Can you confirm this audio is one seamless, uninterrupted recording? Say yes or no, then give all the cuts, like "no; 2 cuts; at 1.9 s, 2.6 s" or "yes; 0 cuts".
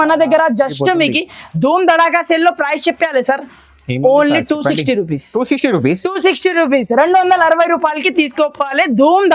yes; 0 cuts